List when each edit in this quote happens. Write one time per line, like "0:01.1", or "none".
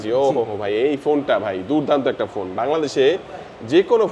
none